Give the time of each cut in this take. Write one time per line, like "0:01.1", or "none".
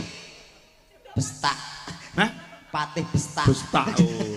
none